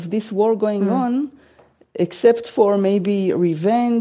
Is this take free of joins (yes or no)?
yes